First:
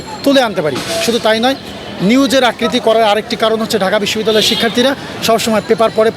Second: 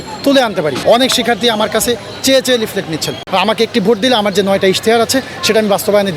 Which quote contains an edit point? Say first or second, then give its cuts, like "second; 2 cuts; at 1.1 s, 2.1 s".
second; 2 cuts; at 0.8 s, 3.1 s